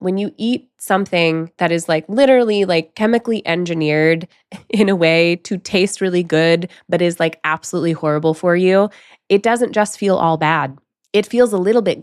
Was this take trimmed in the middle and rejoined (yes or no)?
no